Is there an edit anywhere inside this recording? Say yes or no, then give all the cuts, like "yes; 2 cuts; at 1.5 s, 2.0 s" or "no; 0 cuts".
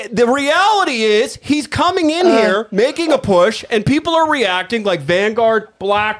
no; 0 cuts